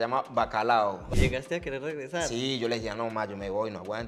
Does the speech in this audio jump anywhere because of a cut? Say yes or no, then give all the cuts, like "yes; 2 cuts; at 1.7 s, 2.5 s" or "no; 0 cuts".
yes; 1 cut; at 1.1 s